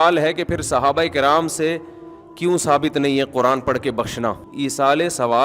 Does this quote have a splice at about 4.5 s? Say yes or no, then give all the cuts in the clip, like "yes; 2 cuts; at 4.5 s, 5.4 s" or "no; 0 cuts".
yes; 1 cut; at 4.5 s